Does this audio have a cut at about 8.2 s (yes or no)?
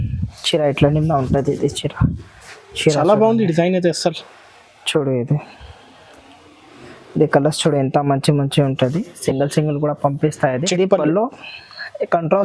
no